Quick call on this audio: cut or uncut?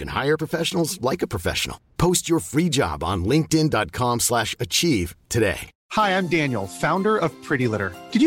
cut